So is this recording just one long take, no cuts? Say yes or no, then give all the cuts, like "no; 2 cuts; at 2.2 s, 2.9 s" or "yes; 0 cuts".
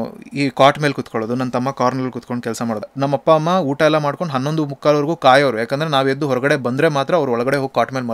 no; 1 cut; at 2.9 s